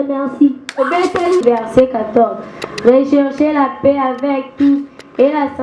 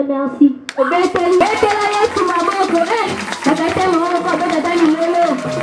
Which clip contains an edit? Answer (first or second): first